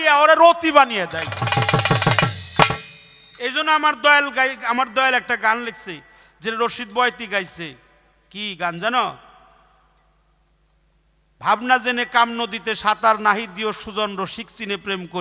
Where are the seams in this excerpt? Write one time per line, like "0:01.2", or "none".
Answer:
none

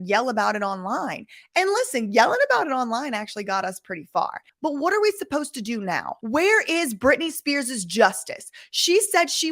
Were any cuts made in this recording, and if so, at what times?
0:04.4
0:06.1

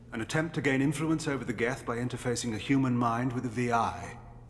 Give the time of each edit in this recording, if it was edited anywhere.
none

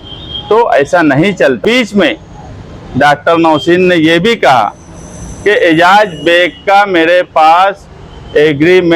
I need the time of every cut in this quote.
0:01.6

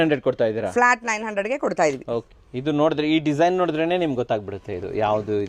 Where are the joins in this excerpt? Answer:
0:02.3

